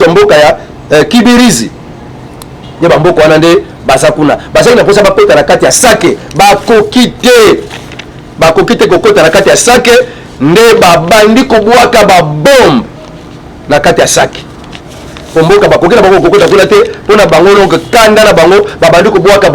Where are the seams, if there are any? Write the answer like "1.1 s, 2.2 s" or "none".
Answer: none